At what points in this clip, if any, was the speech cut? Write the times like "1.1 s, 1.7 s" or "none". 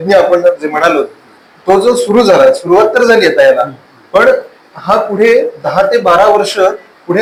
none